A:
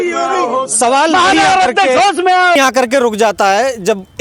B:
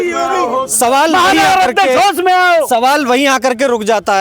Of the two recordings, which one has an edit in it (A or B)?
A